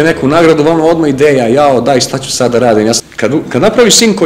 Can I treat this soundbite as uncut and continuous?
no; 1 cut; at 3.0 s

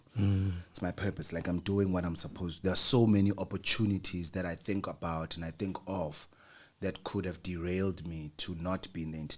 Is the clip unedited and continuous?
yes; 0 cuts

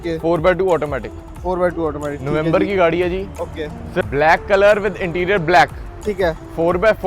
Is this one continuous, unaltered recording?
no; 1 cut; at 4.0 s

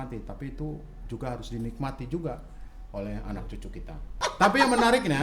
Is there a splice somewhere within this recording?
yes; 1 cut; at 4.2 s

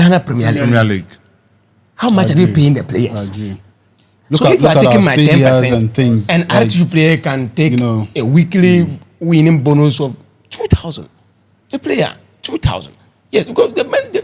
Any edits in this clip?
no; 0 cuts

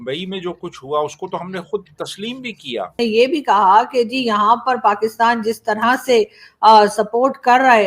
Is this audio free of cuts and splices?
no; 1 cut; at 2.9 s

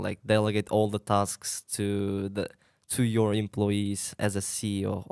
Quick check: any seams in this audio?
no; 0 cuts

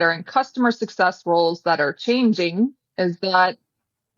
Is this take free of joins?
yes; 0 cuts

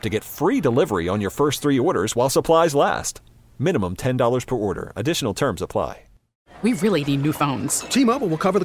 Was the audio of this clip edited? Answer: yes; 1 cut; at 6.4 s

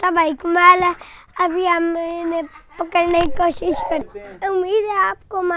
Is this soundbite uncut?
no; 1 cut; at 4.1 s

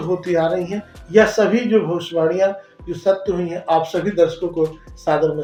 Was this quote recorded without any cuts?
yes; 0 cuts

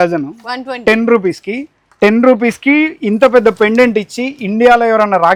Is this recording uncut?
yes; 0 cuts

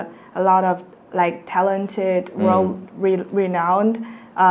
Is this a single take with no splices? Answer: yes; 0 cuts

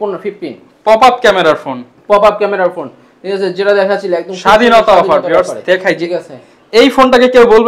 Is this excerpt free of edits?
yes; 0 cuts

